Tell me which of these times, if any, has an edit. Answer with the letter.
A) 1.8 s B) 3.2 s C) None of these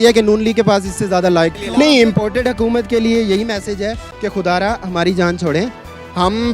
C